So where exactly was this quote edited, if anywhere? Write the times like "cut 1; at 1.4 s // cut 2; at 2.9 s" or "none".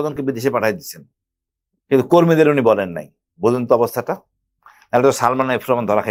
none